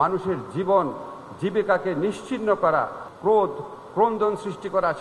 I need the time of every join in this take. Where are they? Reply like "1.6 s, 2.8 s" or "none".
3.0 s